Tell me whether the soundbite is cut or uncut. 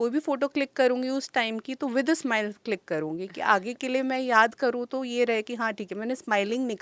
uncut